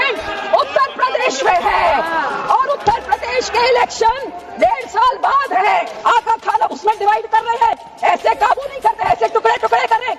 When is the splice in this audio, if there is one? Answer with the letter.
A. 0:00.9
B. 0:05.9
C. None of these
B